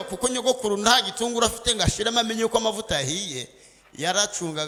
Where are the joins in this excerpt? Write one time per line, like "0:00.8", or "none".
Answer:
none